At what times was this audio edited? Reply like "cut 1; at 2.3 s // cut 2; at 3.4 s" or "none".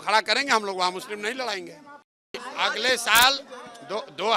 cut 1; at 2.4 s